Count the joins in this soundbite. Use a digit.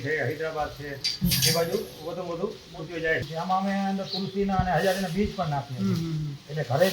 1